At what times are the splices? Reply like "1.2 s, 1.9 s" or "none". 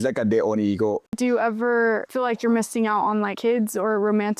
1.1 s